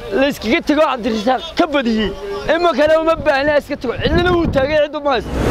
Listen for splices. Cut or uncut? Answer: uncut